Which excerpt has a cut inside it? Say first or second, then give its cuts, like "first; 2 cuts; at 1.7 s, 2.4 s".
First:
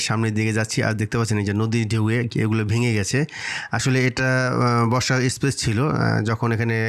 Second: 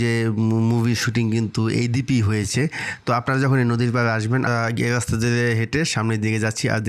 second; 1 cut; at 4.5 s